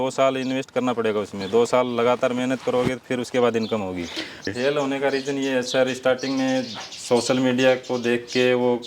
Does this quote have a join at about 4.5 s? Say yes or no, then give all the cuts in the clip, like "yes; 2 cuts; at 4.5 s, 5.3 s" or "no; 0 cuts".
yes; 1 cut; at 4.5 s